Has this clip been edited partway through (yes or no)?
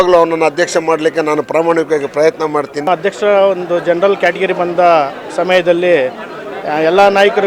yes